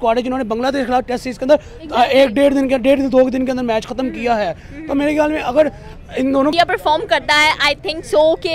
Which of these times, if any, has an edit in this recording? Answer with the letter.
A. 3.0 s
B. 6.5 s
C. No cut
B